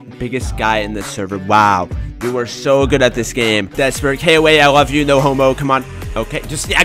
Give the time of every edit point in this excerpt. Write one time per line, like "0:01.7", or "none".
0:01.5
0:03.7